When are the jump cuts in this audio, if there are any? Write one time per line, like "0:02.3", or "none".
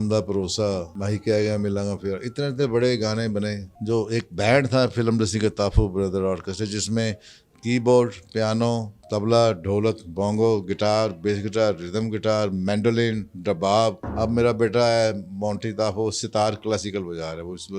0:00.9
0:03.7
0:09.0
0:14.0